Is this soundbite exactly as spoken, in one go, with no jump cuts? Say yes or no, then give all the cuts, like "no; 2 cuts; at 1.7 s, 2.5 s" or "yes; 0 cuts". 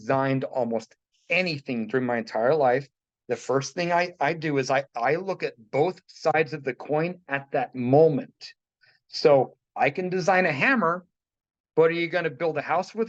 yes; 0 cuts